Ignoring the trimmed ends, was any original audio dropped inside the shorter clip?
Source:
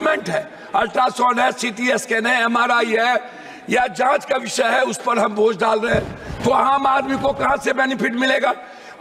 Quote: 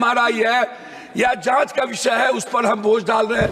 no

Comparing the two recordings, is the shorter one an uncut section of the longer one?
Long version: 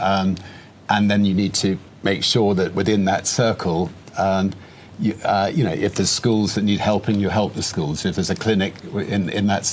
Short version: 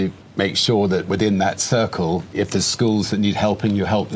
no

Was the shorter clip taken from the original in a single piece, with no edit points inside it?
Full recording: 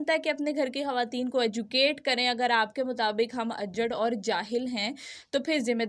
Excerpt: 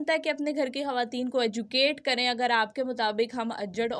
yes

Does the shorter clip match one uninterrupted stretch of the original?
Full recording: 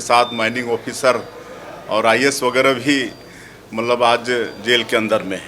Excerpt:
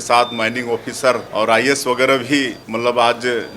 no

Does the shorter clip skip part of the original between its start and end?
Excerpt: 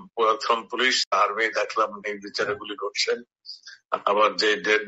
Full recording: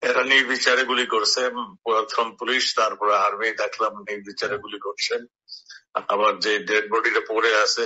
yes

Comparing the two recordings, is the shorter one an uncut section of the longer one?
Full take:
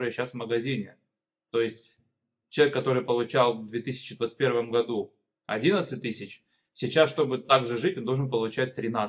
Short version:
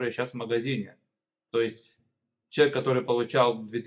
yes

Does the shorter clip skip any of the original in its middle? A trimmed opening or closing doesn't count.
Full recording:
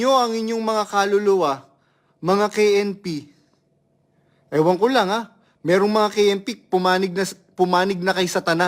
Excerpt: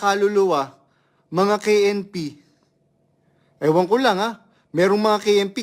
no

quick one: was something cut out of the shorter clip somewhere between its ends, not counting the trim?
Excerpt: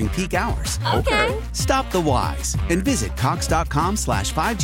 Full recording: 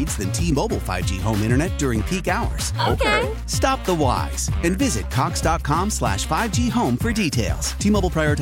no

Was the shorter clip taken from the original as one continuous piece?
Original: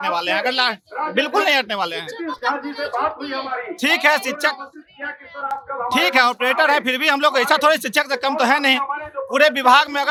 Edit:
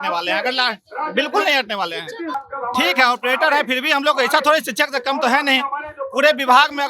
no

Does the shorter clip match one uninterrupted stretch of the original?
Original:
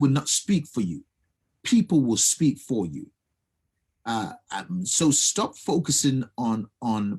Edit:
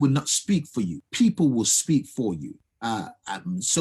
no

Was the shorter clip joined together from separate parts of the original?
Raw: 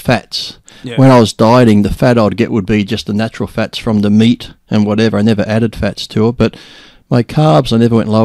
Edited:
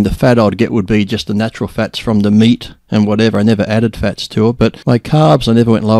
yes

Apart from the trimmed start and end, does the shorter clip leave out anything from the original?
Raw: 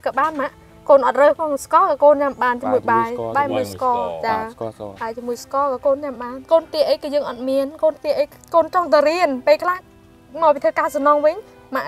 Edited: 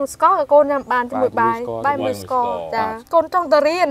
yes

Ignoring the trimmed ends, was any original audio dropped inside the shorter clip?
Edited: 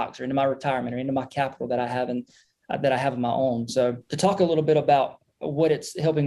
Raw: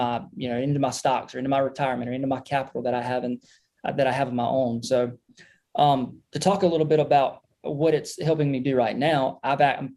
yes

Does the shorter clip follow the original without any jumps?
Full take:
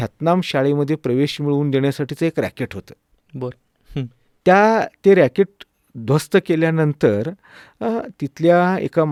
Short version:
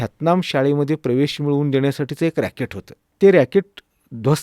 no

